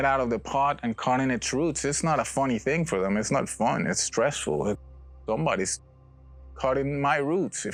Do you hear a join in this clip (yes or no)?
no